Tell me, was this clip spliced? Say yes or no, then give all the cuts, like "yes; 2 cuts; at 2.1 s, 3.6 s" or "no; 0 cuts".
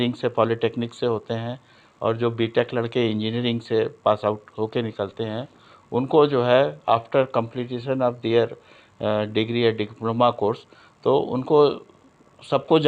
no; 0 cuts